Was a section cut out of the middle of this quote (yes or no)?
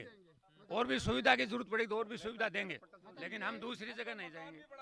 no